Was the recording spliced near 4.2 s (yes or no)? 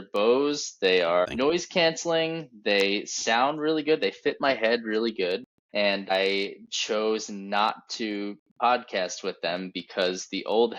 no